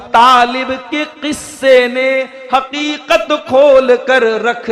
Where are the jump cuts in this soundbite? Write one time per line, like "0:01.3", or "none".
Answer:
none